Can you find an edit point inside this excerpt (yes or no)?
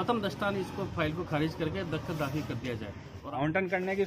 yes